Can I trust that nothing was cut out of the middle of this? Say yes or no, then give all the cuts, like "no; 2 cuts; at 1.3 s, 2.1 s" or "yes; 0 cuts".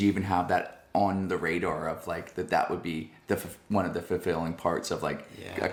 yes; 0 cuts